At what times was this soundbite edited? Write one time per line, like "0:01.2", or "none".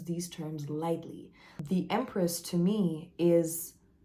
0:01.5